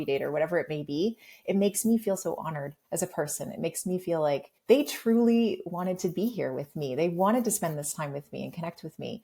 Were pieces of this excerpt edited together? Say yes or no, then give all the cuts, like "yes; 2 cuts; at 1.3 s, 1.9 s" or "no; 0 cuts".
no; 0 cuts